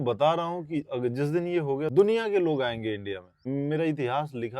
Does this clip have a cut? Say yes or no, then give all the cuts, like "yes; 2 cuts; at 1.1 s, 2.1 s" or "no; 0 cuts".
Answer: yes; 2 cuts; at 1.9 s, 3.4 s